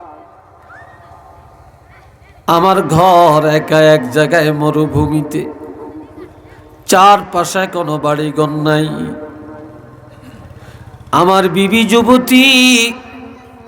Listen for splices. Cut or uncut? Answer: uncut